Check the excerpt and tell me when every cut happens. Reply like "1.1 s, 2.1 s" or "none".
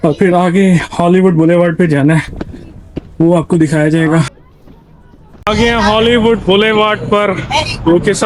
4.3 s

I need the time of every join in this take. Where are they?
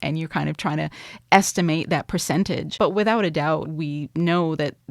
2.7 s, 3.7 s

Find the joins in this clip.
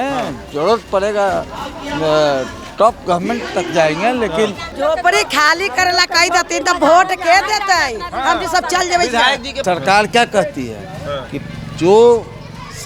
4.6 s, 9.5 s

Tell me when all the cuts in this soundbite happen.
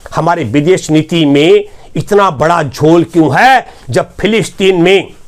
none

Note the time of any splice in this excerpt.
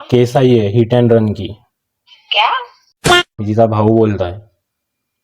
3.0 s

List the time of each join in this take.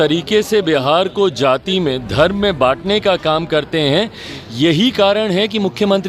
none

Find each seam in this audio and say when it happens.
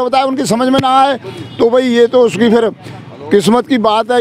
none

